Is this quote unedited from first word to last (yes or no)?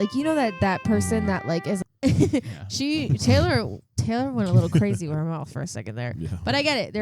no